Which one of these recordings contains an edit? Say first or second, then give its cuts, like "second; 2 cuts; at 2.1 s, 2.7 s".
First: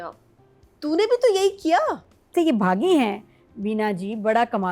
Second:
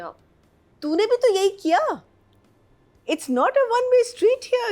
first; 1 cut; at 2.3 s